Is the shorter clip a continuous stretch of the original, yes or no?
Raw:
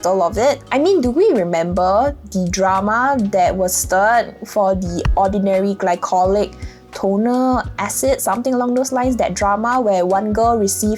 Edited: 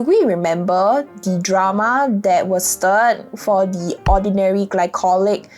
yes